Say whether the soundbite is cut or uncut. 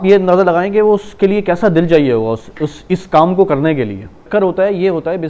cut